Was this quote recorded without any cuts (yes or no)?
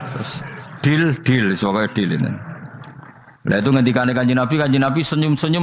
yes